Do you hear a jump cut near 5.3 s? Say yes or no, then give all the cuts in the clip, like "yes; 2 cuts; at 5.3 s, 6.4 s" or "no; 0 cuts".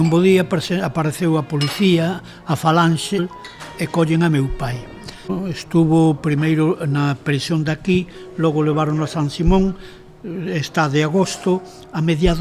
yes; 2 cuts; at 3.2 s, 5.3 s